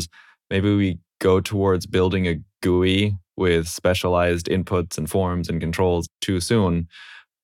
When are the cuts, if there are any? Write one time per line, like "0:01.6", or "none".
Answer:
0:01.1
0:06.1